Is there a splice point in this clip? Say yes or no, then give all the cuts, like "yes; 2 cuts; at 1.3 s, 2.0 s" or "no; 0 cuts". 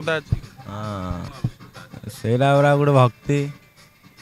yes; 1 cut; at 1.3 s